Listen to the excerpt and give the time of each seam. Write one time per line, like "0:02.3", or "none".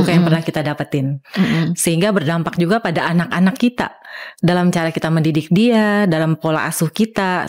none